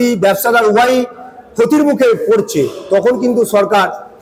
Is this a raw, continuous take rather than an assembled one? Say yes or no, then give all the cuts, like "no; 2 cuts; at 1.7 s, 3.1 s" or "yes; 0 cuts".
yes; 0 cuts